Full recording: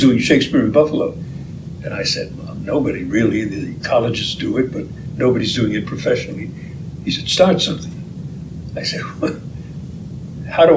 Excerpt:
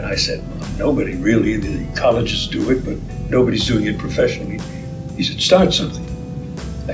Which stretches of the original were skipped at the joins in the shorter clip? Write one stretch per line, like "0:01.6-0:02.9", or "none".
none

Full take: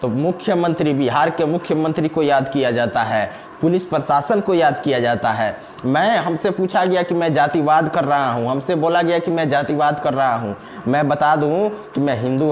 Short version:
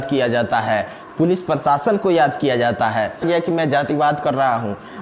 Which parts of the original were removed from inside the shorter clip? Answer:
0:05.7-0:09.0

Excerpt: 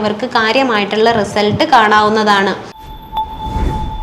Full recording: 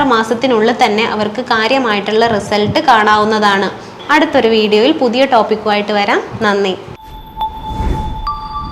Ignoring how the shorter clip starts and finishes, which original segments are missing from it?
0:03.9-0:07.0

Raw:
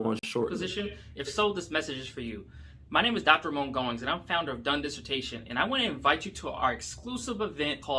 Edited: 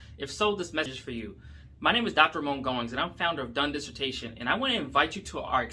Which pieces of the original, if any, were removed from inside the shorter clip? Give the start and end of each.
0:01.9-0:02.0

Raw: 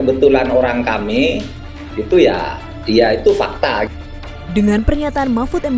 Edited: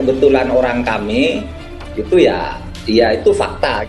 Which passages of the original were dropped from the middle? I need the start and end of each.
none

